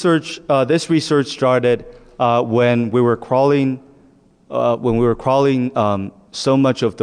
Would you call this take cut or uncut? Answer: cut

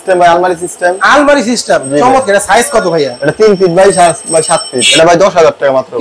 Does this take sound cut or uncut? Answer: cut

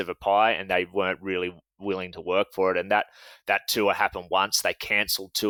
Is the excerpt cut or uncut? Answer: uncut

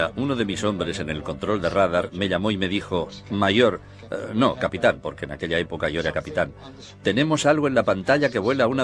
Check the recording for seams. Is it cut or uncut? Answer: uncut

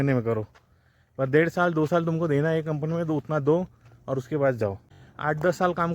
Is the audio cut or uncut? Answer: cut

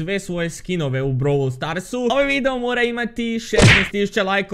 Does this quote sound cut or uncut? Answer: cut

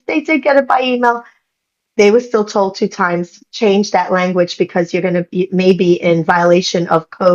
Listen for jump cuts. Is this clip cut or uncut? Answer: uncut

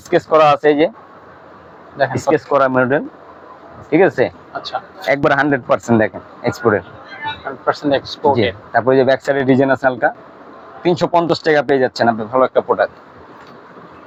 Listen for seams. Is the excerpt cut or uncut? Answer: uncut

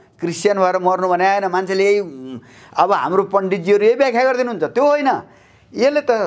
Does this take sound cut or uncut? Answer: uncut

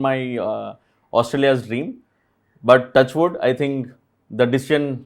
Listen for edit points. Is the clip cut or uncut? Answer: uncut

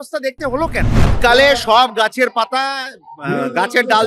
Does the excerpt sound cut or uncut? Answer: cut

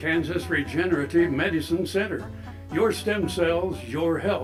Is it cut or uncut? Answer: uncut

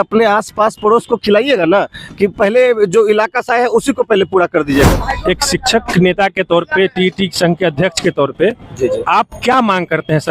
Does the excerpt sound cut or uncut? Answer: cut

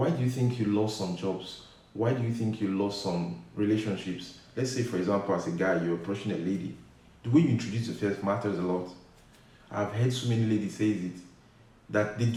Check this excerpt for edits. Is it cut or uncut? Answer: uncut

